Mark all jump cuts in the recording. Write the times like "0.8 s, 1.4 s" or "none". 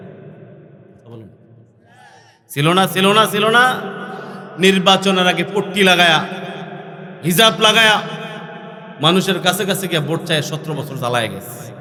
none